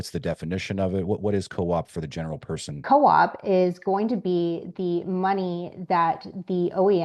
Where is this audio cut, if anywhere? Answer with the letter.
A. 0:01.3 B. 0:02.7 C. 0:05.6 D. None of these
B